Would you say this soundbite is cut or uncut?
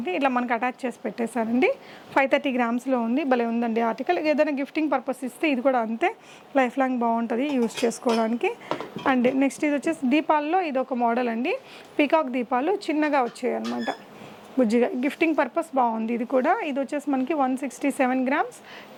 uncut